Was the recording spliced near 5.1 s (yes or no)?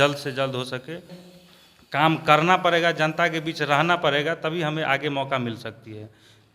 no